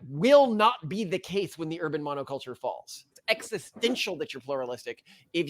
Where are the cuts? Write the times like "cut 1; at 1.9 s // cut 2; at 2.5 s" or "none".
cut 1; at 3.0 s

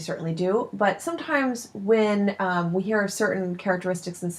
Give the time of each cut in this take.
none

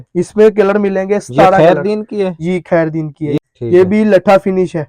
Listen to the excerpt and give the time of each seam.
cut 1; at 3.4 s

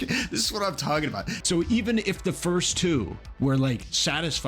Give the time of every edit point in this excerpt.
cut 1; at 1.3 s

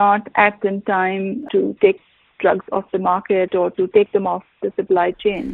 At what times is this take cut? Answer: none

